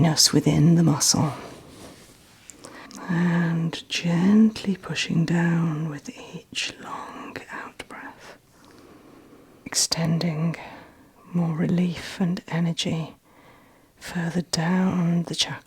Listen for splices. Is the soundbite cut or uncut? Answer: cut